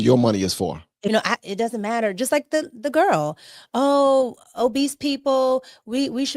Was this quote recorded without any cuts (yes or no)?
no